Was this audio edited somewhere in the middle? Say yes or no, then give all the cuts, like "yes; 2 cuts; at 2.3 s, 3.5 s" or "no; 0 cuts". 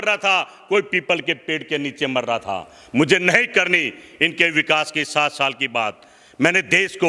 no; 0 cuts